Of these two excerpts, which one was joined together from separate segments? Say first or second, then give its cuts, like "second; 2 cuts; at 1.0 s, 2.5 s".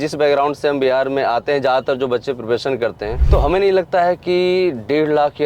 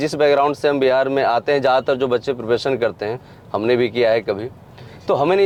first; 1 cut; at 3.1 s